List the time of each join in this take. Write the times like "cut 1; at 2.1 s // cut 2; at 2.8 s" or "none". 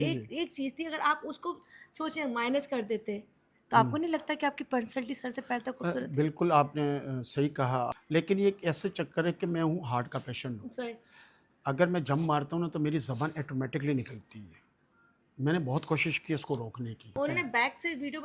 cut 1; at 8.0 s // cut 2; at 17.2 s